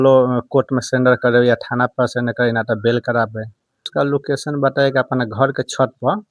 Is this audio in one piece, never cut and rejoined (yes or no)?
no